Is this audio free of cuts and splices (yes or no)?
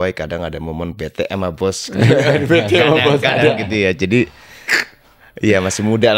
yes